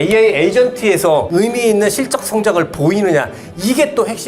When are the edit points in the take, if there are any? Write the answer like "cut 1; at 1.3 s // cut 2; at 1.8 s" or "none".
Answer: cut 1; at 1.3 s